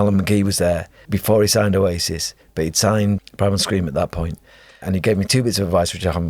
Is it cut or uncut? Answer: cut